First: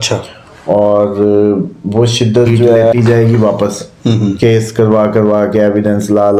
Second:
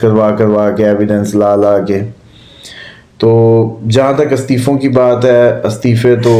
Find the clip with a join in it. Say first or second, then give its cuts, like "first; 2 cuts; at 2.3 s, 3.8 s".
first; 1 cut; at 2.9 s